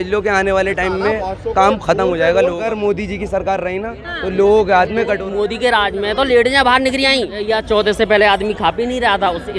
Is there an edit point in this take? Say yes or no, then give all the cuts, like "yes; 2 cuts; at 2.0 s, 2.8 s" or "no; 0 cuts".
yes; 3 cuts; at 2.6 s, 5.3 s, 7.5 s